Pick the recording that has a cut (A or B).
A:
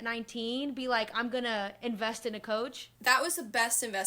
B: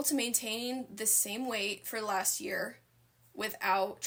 A